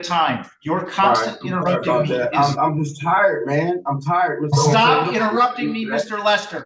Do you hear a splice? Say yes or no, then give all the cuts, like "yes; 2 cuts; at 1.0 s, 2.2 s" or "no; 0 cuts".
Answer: no; 0 cuts